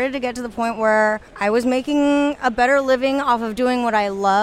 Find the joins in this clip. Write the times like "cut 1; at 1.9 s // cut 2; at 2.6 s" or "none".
cut 1; at 1.3 s